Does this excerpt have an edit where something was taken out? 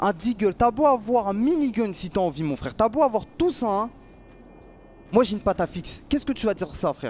no; 0 cuts

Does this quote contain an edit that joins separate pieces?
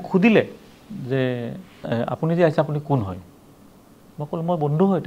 yes; 1 cut; at 1.8 s

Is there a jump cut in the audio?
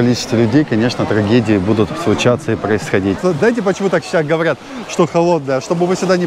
yes; 1 cut; at 3.2 s

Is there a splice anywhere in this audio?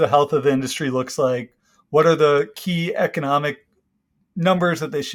no; 0 cuts

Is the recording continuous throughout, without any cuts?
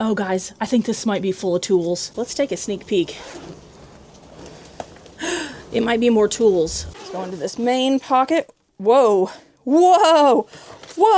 no; 2 cuts; at 2.1 s, 6.8 s

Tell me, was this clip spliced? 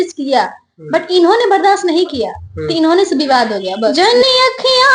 yes; 1 cut; at 3.9 s

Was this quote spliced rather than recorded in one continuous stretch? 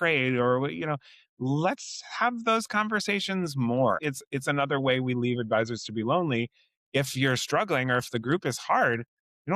yes; 1 cut; at 4.0 s

